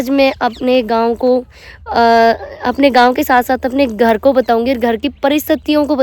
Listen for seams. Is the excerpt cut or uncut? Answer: uncut